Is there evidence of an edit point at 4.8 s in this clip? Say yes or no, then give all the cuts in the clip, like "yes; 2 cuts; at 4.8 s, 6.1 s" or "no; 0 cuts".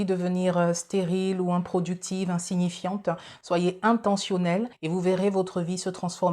yes; 1 cut; at 4.8 s